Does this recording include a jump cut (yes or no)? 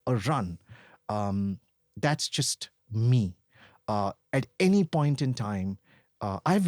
no